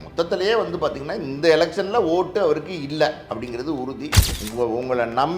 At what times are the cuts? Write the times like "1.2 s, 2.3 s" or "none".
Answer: 4.3 s